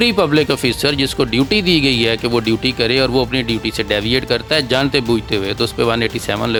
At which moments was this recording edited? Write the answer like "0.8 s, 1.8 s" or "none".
none